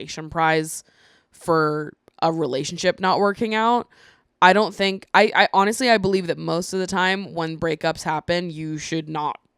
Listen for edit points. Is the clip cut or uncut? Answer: uncut